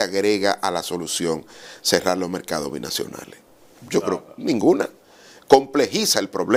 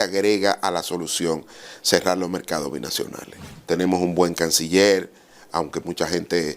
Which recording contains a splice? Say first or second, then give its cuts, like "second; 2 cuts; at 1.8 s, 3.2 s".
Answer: second; 1 cut; at 3.5 s